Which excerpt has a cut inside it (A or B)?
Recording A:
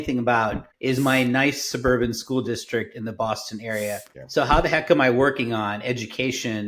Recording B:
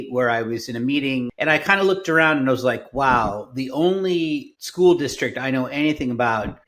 B